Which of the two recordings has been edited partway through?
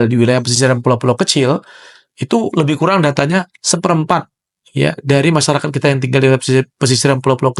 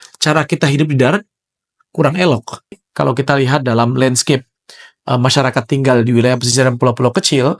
second; 1 cut; at 2.8 s

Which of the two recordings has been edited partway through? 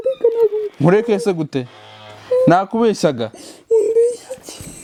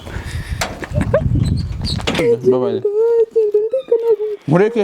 second; 1 cut; at 2.2 s

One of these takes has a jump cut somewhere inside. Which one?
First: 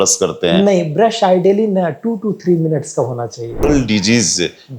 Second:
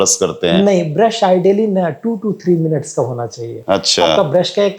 first; 1 cut; at 3.6 s

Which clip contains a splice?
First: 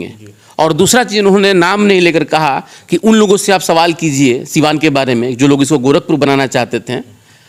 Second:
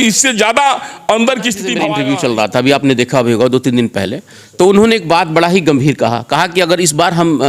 second; 1 cut; at 1.8 s

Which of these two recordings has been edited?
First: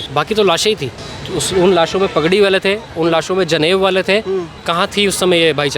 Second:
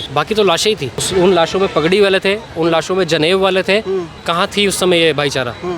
second; 1 cut; at 1.0 s

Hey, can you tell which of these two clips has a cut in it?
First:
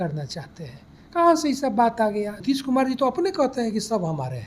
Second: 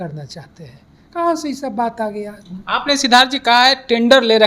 first; 1 cut; at 2.4 s

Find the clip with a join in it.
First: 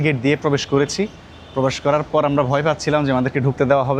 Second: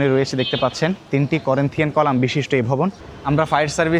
second; 2 cuts; at 1.0 s, 3.1 s

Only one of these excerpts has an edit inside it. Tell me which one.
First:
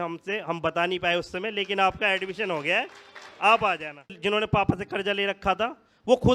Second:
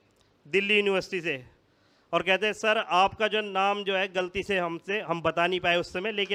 first; 1 cut; at 4.1 s

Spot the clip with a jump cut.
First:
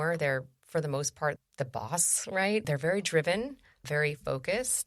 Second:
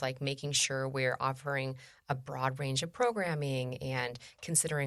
first; 2 cuts; at 1.4 s, 2.6 s

